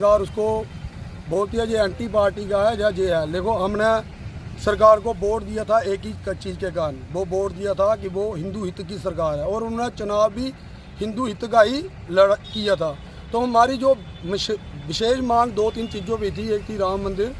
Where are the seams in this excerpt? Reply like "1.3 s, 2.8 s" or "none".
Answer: none